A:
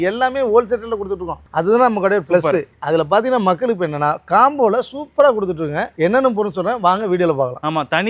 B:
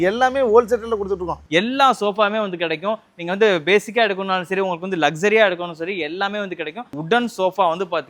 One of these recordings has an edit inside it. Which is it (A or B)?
B